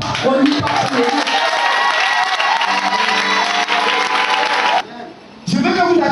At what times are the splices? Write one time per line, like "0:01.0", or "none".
0:04.8

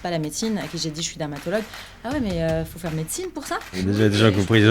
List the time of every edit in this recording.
0:03.8

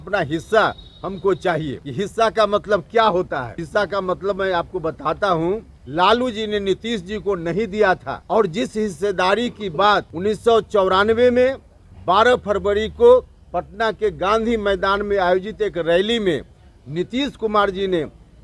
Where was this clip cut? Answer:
0:01.8
0:03.6
0:05.8
0:08.1
0:10.1

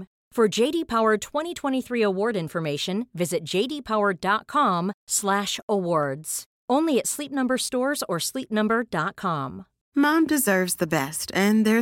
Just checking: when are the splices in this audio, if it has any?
0:09.8

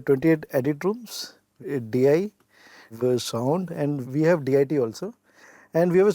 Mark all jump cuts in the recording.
0:01.5
0:02.9
0:04.0

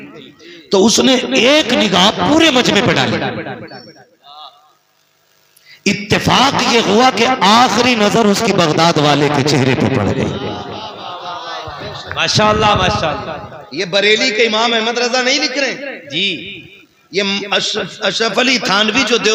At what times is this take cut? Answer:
none

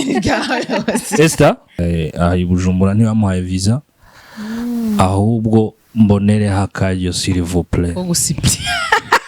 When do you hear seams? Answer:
0:01.8

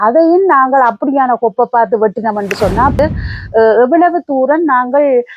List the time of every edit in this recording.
0:03.0

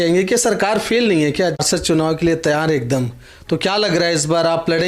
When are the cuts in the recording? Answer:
0:01.6

